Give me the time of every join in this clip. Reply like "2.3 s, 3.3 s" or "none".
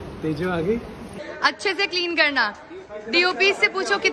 1.2 s